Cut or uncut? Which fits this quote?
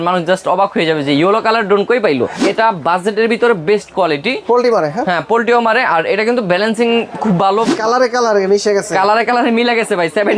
cut